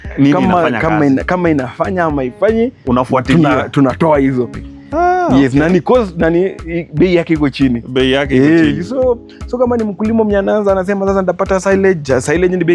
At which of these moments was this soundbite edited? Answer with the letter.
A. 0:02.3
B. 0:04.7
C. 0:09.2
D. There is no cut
B